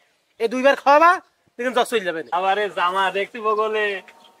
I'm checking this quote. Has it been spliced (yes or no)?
yes